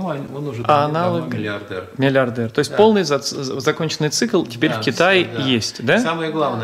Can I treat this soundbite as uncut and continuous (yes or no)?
yes